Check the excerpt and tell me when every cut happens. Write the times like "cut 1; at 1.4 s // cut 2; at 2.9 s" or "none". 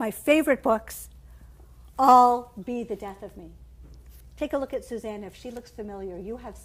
none